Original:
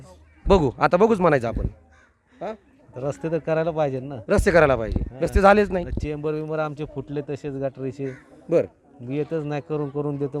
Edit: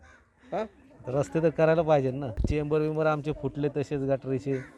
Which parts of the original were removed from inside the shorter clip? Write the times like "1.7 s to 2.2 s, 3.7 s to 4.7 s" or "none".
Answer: 4.2 s to 5.9 s